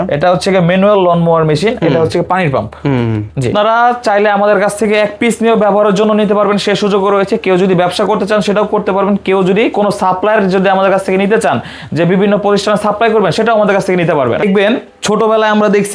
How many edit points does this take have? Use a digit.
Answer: 2